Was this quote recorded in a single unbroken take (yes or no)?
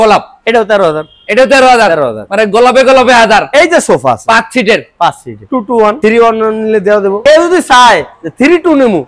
yes